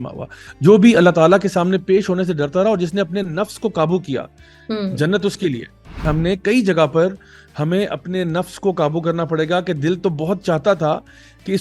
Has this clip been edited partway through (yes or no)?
yes